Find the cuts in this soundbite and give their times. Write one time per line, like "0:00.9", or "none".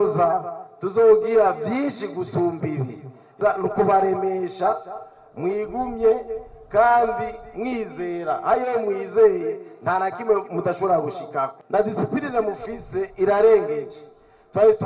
0:03.3
0:11.6